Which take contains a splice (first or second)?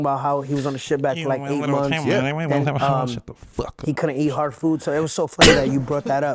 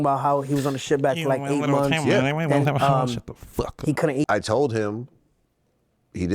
second